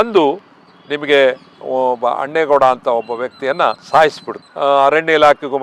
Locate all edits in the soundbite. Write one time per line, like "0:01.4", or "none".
0:04.4